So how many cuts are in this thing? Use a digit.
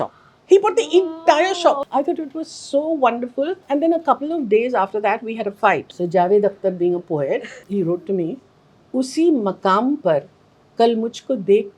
4